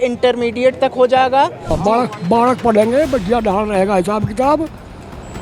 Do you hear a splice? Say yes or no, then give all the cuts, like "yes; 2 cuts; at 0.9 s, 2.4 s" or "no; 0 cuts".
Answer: yes; 1 cut; at 1.8 s